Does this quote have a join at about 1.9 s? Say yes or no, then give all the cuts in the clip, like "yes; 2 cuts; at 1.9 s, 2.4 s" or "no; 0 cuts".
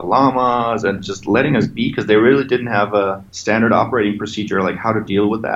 no; 1 cut; at 3.3 s